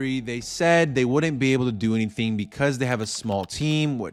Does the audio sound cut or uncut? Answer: uncut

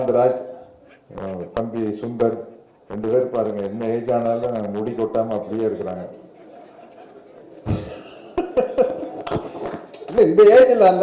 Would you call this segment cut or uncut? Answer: uncut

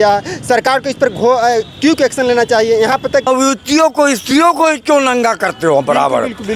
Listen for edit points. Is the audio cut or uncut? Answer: cut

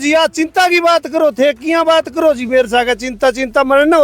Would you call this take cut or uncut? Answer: uncut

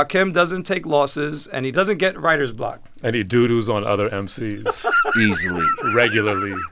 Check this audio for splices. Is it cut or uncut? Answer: uncut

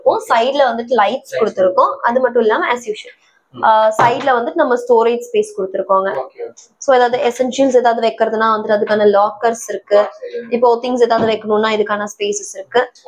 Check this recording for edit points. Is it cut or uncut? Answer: uncut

